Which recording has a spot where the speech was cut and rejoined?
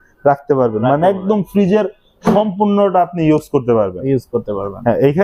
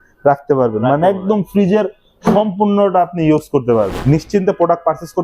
second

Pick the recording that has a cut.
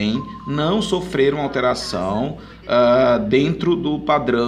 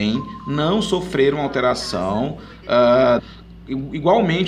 first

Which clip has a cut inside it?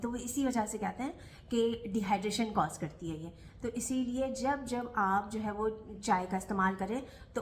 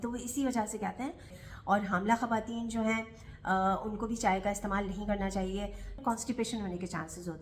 second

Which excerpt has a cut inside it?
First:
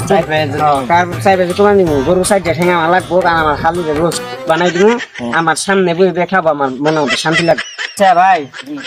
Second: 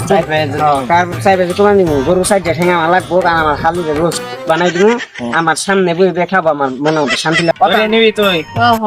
second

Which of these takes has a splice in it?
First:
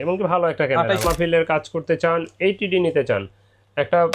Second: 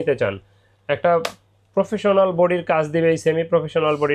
first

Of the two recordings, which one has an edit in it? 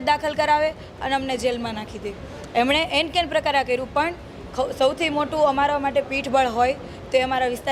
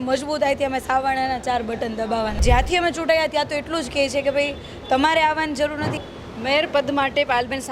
second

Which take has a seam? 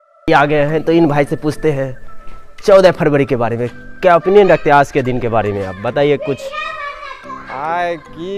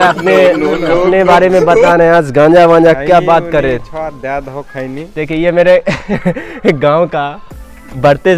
first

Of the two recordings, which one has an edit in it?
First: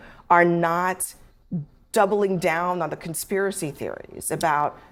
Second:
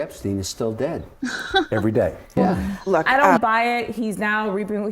second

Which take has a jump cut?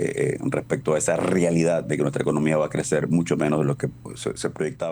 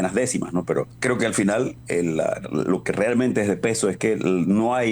second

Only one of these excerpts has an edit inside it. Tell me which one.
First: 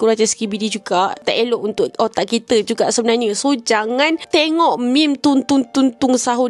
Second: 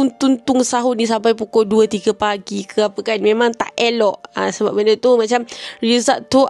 first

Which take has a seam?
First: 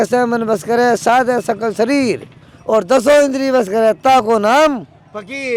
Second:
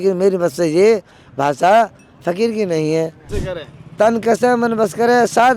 second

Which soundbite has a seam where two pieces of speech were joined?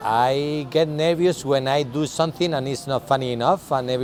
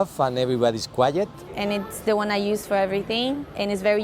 second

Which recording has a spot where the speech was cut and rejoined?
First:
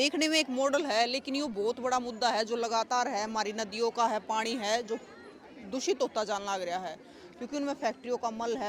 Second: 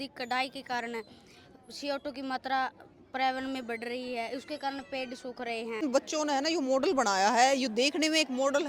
second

